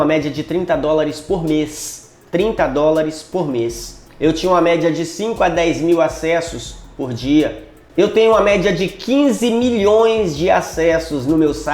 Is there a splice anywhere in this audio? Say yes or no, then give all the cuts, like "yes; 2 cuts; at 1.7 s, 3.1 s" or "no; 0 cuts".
yes; 1 cut; at 7.7 s